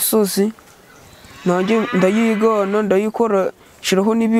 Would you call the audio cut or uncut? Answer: uncut